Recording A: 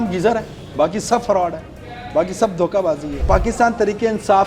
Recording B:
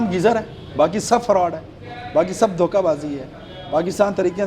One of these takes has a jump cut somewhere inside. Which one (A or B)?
A